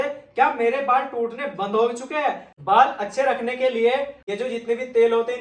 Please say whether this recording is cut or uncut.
cut